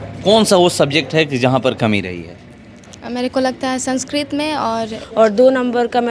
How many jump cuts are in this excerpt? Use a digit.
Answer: 1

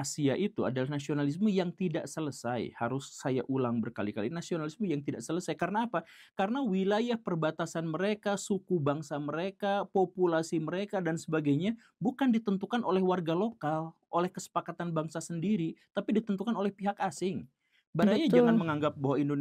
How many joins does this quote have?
0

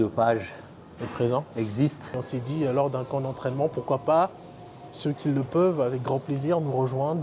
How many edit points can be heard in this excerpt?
1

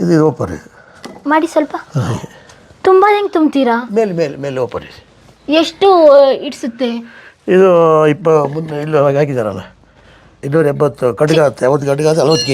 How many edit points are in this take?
1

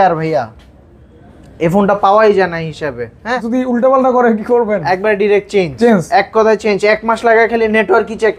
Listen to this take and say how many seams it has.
1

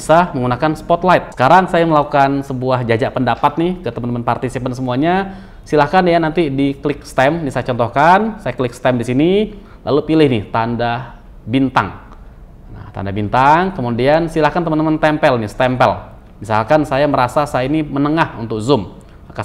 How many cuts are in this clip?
1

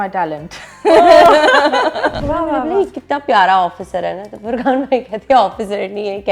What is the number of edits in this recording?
1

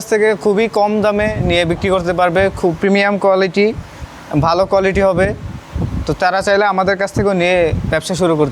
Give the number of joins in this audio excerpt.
0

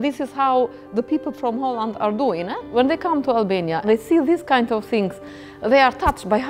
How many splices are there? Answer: 2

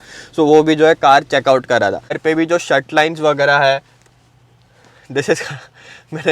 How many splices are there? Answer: 1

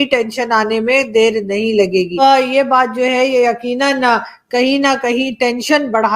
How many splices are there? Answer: 1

